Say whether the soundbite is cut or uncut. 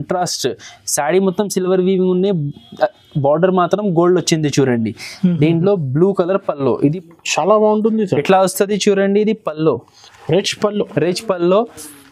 cut